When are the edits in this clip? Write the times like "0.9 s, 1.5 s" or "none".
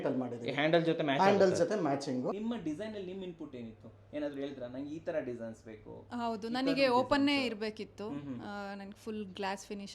2.3 s